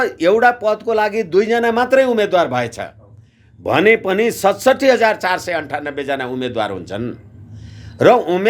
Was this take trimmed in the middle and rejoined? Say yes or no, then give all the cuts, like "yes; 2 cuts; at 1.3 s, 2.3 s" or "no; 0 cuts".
no; 0 cuts